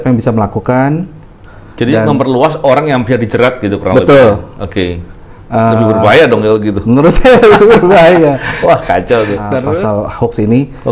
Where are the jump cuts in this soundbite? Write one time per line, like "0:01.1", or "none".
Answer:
0:09.7